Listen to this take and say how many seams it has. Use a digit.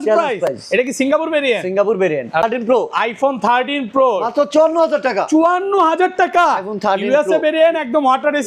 1